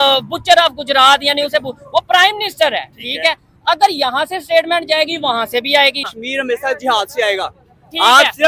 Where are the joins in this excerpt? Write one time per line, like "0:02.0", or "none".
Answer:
0:06.1